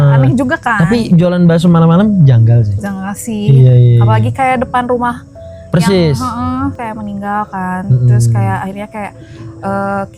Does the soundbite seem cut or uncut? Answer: cut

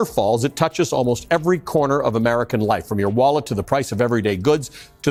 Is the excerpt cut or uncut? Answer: uncut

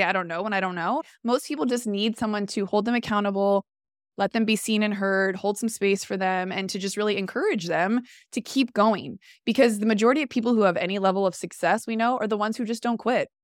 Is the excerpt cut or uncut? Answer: cut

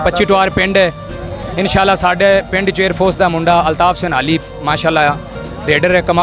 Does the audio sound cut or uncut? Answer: uncut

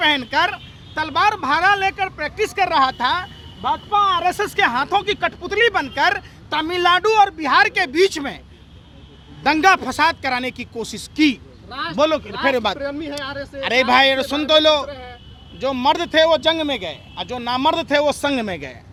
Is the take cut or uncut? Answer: uncut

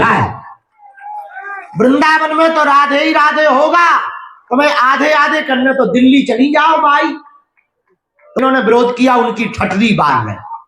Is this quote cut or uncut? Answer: cut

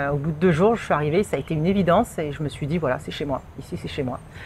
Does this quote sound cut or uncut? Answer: uncut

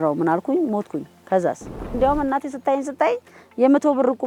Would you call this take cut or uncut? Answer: cut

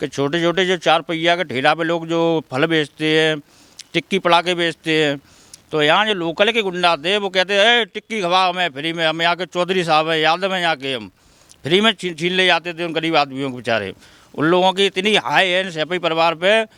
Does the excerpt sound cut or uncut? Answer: uncut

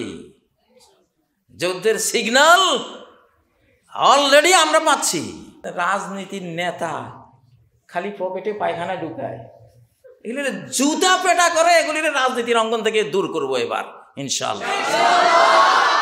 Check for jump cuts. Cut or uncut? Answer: cut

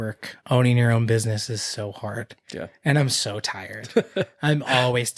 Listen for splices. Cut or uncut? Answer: uncut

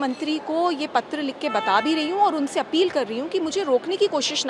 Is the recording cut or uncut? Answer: uncut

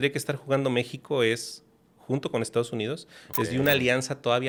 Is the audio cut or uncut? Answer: uncut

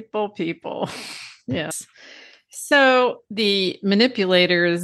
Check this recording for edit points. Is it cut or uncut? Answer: cut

